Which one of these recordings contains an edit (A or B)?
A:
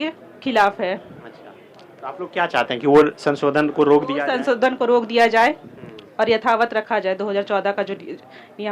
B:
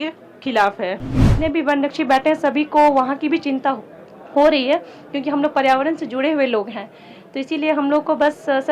B